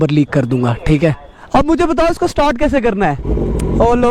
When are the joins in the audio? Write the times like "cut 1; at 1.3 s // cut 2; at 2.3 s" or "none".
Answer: cut 1; at 1.3 s